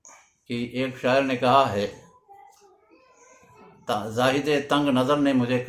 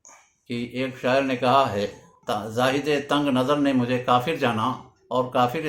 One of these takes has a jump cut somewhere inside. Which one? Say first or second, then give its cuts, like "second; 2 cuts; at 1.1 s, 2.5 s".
second; 1 cut; at 2.1 s